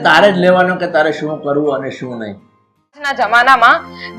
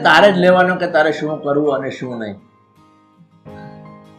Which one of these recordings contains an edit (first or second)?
first